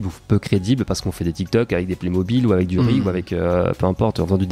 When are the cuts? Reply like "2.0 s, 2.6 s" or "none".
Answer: none